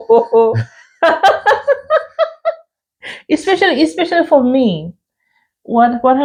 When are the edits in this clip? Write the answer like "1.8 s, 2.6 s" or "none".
none